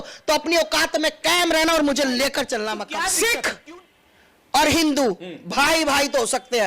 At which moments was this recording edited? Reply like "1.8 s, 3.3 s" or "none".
3.0 s